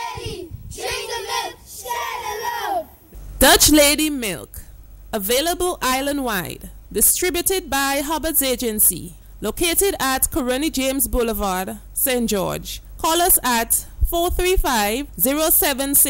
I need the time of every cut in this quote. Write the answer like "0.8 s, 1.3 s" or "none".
11.9 s